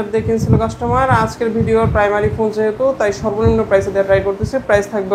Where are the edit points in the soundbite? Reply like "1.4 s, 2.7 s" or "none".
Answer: none